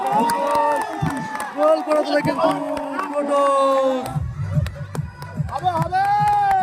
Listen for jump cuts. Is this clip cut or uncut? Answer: cut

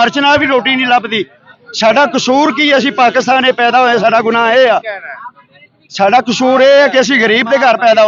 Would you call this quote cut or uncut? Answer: uncut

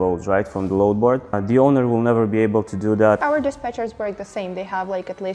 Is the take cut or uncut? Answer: cut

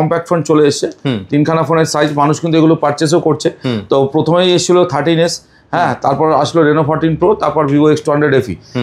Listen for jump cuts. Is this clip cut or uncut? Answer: uncut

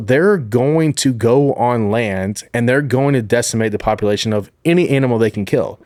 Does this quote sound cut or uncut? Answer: uncut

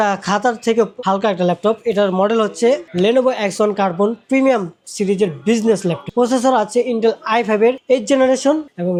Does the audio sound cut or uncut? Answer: uncut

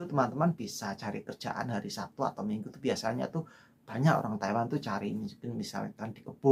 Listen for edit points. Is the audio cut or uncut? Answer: uncut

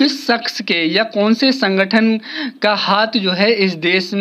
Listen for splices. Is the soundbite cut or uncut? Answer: uncut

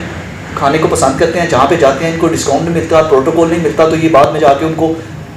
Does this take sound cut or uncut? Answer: uncut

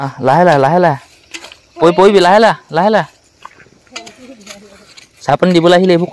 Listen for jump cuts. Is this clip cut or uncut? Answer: uncut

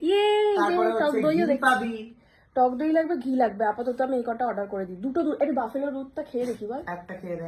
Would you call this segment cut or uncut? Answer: uncut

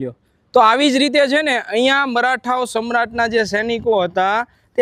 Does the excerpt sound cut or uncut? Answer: uncut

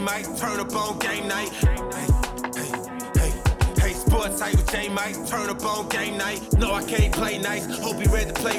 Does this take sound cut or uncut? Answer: uncut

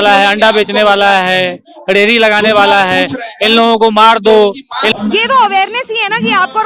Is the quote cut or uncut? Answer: cut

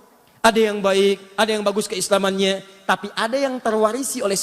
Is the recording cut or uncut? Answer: uncut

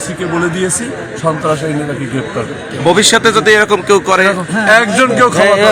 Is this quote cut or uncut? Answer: uncut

